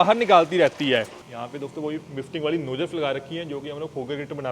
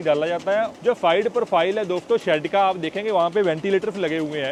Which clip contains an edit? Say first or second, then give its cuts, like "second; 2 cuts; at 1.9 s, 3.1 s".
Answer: first; 1 cut; at 1.2 s